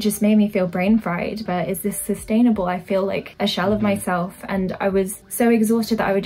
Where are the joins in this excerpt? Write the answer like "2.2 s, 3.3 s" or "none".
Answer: 1.4 s, 3.3 s, 5.2 s